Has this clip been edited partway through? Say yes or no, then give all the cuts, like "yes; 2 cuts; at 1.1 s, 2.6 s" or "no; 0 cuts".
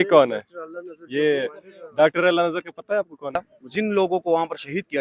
yes; 1 cut; at 3.6 s